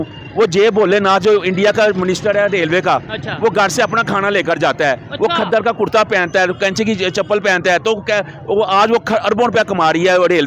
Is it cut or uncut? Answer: uncut